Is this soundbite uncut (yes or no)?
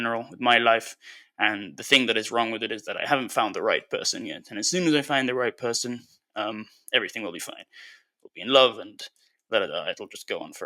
yes